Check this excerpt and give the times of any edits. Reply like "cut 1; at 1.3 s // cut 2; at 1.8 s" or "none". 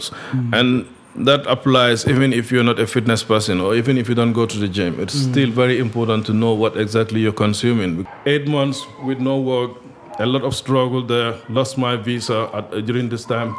cut 1; at 8.0 s